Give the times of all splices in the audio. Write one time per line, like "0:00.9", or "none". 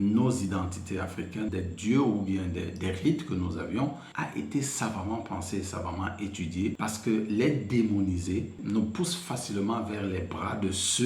0:01.5
0:04.1
0:06.8